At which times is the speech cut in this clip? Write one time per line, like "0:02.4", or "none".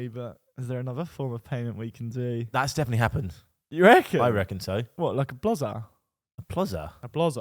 none